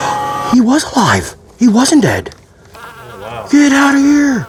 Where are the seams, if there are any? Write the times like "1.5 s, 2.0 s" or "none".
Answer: none